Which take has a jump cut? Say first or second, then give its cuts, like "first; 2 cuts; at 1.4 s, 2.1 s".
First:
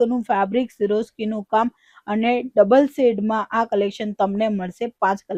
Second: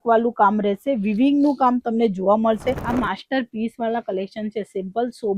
second; 1 cut; at 2.8 s